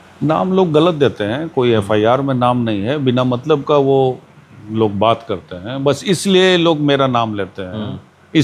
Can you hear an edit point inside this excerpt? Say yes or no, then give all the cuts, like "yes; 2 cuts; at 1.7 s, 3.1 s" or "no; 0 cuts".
no; 0 cuts